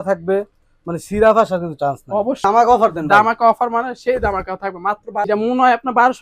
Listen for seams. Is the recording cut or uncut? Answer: cut